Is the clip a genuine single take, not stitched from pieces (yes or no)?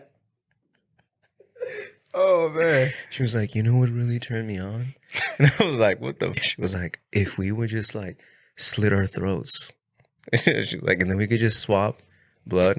no